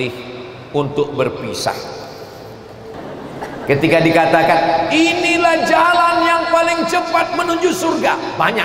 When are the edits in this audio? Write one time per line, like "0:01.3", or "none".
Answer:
0:02.9